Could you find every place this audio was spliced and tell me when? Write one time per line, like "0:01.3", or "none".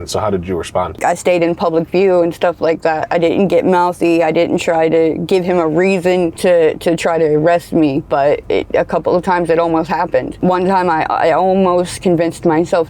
0:01.0
0:06.3
0:10.3